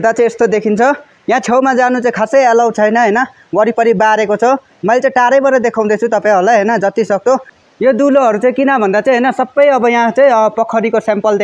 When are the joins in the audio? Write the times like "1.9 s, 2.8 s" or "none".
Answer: 7.5 s

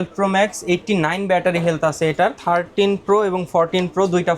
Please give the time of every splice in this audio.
2.4 s

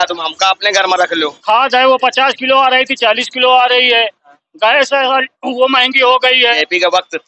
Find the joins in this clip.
1.3 s, 6.6 s

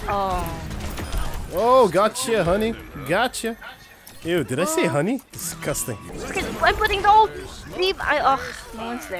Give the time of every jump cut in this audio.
6.1 s

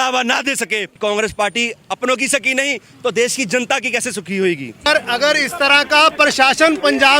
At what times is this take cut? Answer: 0.9 s, 4.9 s

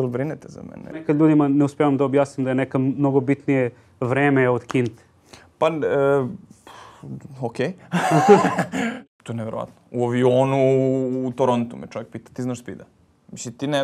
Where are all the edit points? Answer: 1.0 s, 8.9 s

